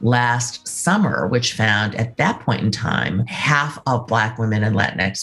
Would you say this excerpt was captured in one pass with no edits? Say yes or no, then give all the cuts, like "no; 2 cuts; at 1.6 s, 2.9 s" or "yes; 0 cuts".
no; 1 cut; at 3.3 s